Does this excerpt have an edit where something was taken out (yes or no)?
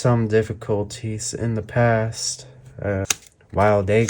yes